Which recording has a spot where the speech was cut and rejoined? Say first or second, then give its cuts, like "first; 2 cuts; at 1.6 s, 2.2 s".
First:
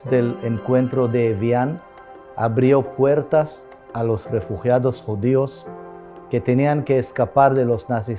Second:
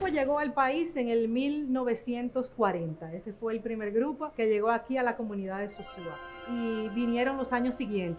second; 2 cuts; at 4.3 s, 6.4 s